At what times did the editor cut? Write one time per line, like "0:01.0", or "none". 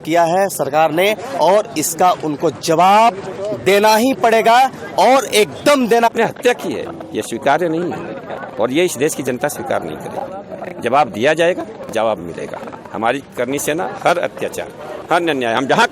0:06.1